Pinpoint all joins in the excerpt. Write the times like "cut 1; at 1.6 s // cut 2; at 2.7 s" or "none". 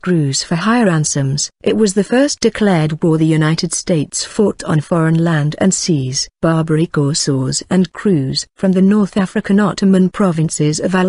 cut 1; at 2.4 s